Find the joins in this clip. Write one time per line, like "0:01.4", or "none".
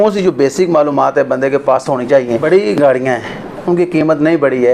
0:02.3